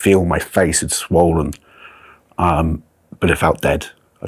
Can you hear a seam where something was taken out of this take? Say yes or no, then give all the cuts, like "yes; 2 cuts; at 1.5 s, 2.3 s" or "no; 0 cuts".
no; 0 cuts